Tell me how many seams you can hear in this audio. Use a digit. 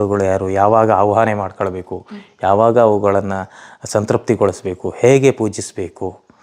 0